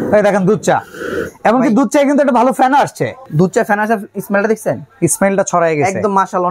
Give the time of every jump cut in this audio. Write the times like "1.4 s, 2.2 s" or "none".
none